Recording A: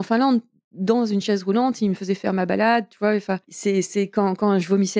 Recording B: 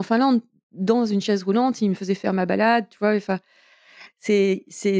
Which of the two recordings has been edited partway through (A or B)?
A